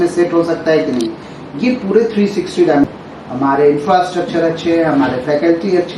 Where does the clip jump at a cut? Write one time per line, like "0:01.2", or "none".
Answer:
0:02.9